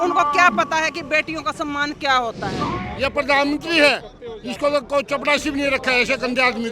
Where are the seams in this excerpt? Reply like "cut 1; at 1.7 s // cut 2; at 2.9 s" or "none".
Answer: cut 1; at 2.7 s